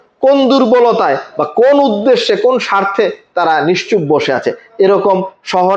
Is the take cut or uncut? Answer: uncut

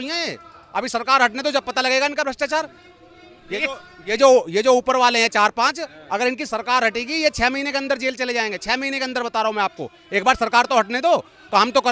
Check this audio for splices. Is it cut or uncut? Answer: uncut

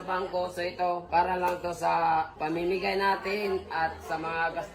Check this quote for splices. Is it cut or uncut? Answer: cut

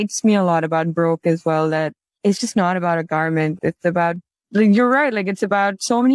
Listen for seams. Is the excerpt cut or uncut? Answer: uncut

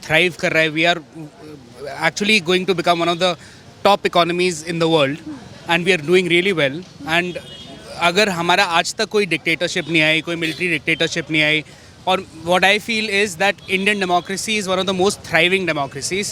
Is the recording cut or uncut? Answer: uncut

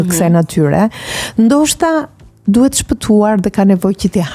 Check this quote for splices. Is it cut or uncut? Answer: uncut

